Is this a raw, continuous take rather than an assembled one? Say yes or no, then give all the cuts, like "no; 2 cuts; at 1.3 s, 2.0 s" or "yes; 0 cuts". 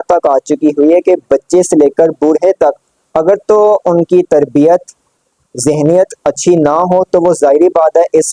yes; 0 cuts